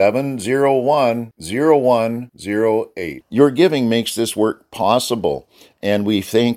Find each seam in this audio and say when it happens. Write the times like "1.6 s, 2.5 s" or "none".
none